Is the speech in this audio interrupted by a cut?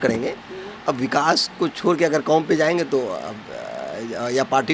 no; 0 cuts

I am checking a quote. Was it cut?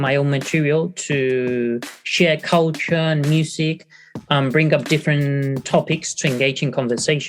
no; 0 cuts

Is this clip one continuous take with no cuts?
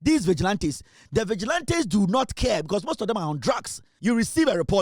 no; 1 cut; at 3.9 s

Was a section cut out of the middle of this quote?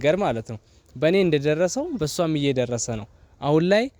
no; 0 cuts

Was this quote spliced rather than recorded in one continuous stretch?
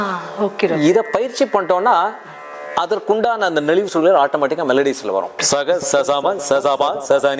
yes; 1 cut; at 5.4 s

